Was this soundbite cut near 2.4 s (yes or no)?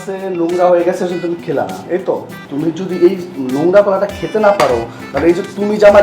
yes